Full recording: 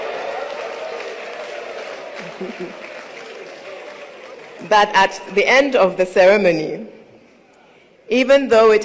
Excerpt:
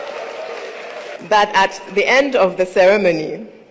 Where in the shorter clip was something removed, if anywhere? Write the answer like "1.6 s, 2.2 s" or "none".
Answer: 1.2 s

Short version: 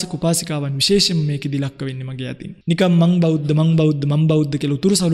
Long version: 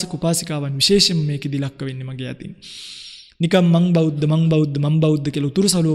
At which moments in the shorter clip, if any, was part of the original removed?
2.5 s

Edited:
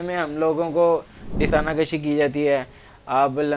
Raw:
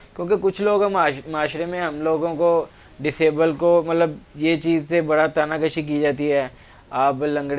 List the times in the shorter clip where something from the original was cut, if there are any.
1.5 s

